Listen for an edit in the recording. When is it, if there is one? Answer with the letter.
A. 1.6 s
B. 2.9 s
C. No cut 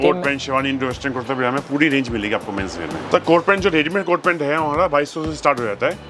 B